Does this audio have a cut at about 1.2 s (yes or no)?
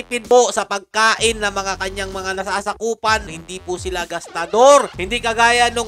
no